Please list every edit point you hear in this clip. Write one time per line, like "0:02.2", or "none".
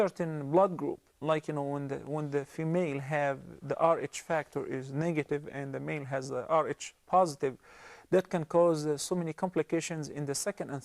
0:07.7